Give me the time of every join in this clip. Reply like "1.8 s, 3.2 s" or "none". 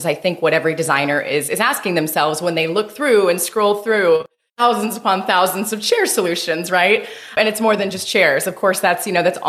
4.4 s, 7.3 s